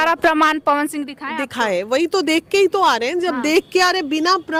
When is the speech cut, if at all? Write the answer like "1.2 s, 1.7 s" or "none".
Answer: none